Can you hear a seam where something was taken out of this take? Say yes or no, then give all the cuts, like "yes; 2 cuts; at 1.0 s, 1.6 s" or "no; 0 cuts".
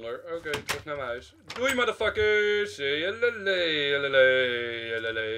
no; 0 cuts